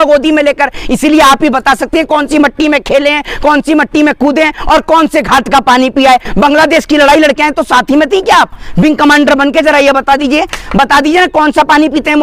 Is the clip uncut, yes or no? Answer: yes